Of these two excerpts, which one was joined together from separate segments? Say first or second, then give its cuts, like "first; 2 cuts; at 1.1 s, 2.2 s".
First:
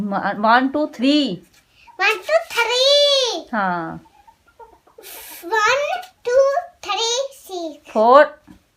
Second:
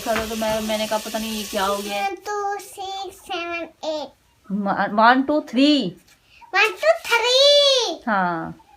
second; 1 cut; at 2.0 s